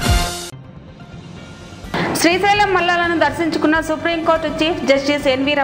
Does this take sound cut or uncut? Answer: uncut